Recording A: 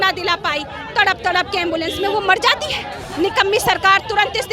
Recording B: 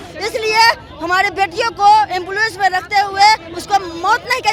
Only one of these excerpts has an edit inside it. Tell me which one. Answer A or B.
A